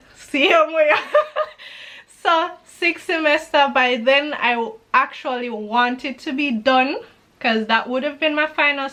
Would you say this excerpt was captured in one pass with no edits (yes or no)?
yes